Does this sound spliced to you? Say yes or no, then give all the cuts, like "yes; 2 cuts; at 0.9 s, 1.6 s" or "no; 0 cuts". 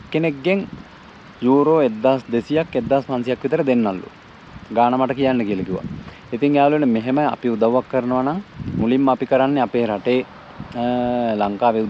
no; 0 cuts